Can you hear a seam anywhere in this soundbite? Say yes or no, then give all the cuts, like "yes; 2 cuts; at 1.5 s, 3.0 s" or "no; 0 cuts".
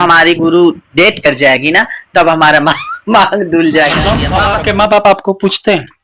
yes; 1 cut; at 4.3 s